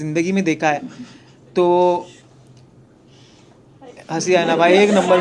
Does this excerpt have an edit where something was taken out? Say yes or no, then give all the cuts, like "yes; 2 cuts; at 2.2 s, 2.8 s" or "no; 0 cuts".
no; 0 cuts